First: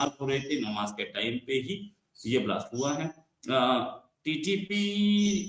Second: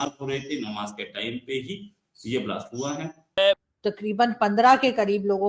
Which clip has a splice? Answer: second; 1 cut; at 3.3 s

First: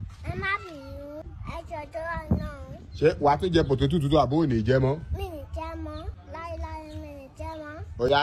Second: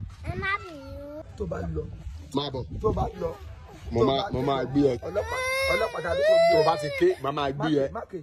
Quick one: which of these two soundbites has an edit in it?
second; 1 cut; at 1.2 s

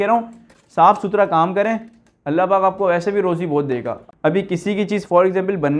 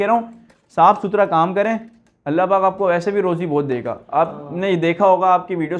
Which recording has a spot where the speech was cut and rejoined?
first; 1 cut; at 4.0 s

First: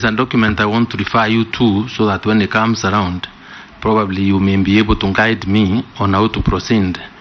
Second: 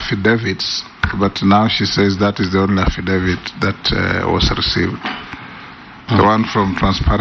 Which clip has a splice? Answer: second; 1 cut; at 6.3 s

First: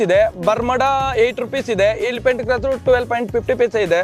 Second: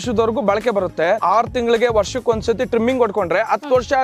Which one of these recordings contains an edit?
second; 1 cut; at 1.2 s

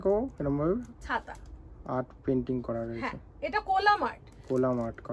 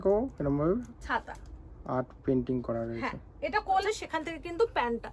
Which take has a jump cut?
second; 1 cut; at 3.8 s

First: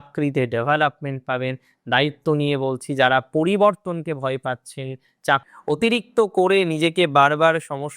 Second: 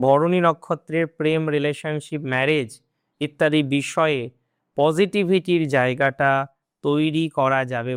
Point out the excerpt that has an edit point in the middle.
first; 1 cut; at 5.4 s

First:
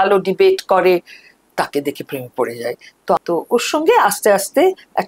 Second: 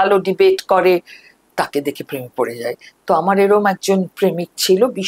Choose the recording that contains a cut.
first; 1 cut; at 3.2 s

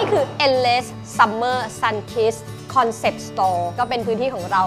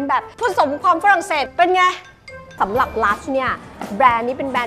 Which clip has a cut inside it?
second; 2 cuts; at 1.4 s, 2.5 s

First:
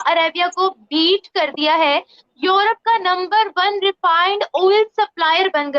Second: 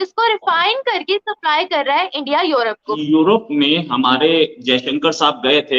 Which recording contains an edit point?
second; 1 cut; at 2.9 s

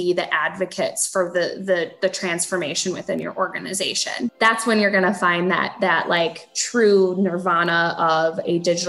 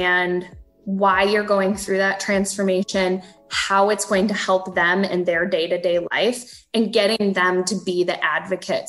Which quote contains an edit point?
first; 1 cut; at 4.3 s

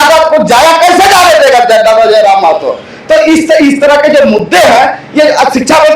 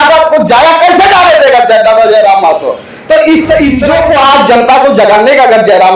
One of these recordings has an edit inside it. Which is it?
second; 1 cut; at 3.9 s

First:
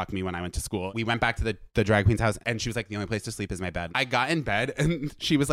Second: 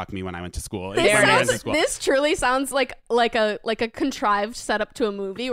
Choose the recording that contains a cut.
first; 3 cuts; at 0.9 s, 2.4 s, 3.9 s

